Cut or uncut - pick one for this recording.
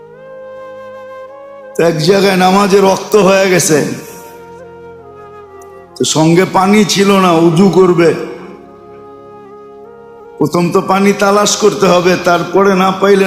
cut